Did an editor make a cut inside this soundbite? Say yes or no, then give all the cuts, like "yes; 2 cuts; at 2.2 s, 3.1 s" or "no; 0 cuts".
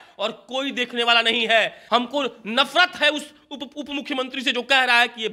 yes; 1 cut; at 1.8 s